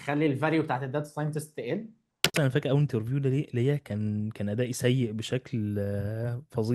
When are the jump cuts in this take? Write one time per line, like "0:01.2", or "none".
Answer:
0:02.3